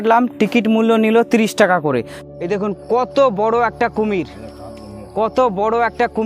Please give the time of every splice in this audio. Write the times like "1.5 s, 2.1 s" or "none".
2.1 s